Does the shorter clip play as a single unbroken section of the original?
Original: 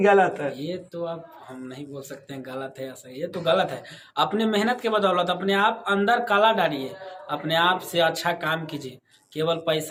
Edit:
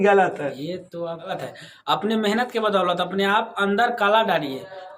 no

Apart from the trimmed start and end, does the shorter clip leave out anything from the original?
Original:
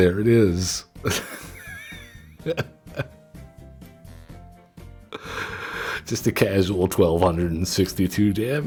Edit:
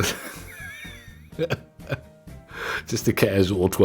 yes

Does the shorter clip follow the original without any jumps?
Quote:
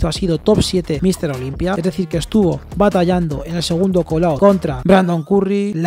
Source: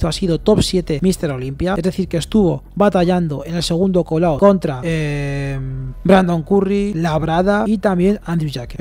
no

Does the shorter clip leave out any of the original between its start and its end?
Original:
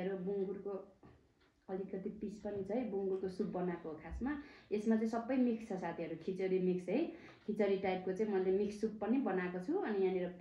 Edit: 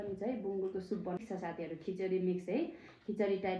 yes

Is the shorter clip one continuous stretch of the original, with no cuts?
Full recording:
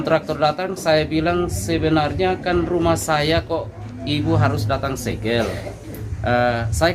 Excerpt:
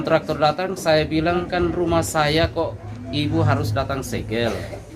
no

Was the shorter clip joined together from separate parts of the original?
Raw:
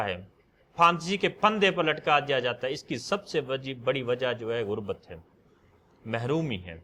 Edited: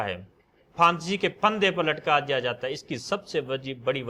no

